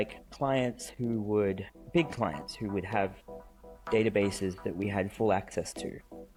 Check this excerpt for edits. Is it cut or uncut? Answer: uncut